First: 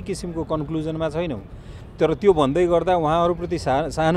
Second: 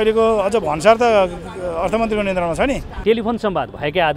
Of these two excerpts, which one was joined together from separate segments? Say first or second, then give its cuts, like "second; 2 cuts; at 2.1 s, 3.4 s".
second; 1 cut; at 2.9 s